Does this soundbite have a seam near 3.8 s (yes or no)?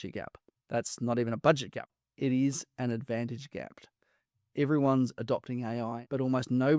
no